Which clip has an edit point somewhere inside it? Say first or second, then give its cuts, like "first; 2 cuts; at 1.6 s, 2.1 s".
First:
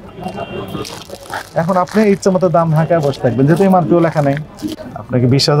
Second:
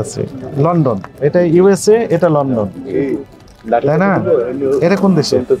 first; 1 cut; at 4.6 s